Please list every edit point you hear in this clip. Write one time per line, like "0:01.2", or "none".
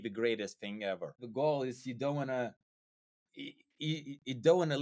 0:01.2